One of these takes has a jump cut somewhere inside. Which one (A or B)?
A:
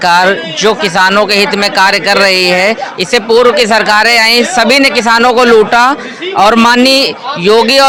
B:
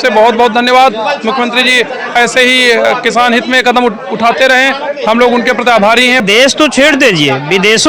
B